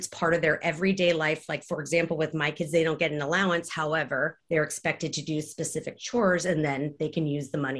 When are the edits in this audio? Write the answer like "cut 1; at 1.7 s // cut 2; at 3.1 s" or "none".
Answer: cut 1; at 4.4 s